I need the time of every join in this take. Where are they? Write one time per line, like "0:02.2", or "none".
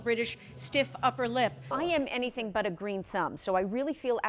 0:01.7